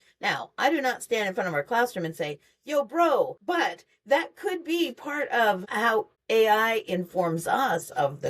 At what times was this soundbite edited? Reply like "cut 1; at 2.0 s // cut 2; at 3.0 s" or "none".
cut 1; at 3.4 s // cut 2; at 5.9 s